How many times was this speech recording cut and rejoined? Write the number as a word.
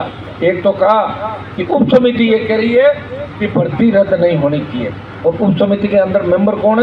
zero